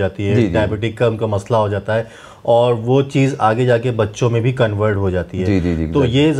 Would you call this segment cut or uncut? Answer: uncut